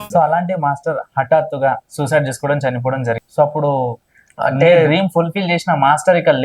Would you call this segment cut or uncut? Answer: cut